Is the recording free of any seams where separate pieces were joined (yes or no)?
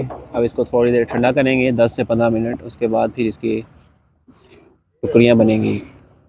yes